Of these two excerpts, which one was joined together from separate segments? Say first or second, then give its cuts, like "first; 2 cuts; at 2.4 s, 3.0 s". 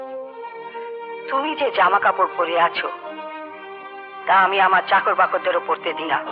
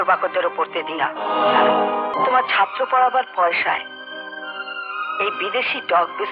second; 1 cut; at 2.2 s